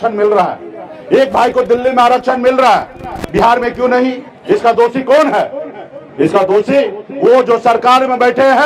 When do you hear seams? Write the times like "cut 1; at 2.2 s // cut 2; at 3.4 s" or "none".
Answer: cut 1; at 4.3 s